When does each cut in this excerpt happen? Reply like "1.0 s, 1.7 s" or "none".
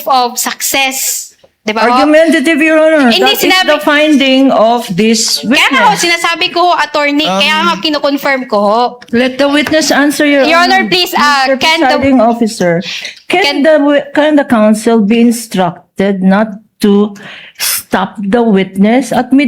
9.0 s